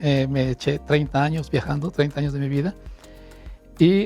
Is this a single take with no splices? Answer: yes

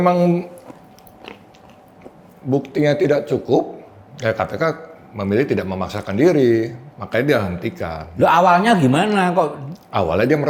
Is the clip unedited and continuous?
yes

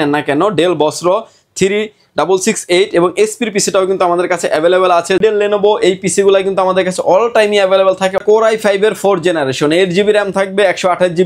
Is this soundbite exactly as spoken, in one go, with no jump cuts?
no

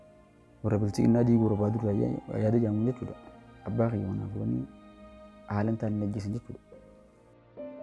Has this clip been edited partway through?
yes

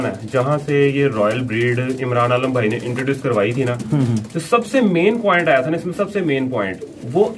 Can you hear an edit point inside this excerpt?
no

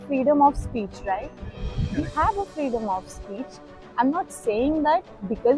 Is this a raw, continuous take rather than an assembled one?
yes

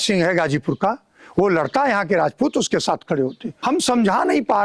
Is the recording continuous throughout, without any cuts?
no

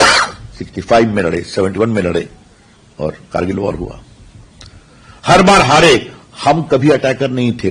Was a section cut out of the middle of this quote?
no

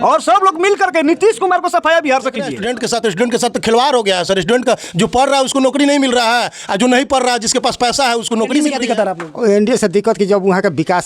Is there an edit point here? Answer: yes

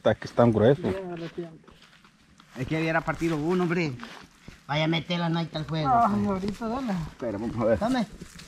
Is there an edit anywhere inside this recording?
no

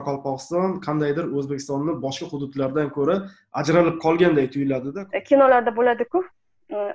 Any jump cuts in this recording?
yes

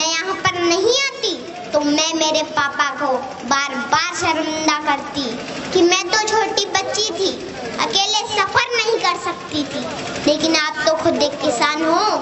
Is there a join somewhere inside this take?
no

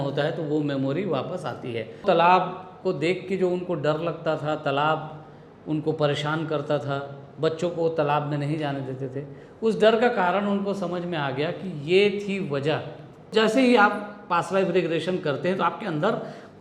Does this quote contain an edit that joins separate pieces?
yes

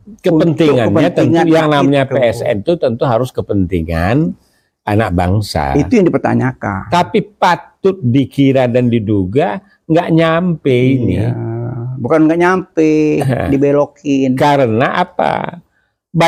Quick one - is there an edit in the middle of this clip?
no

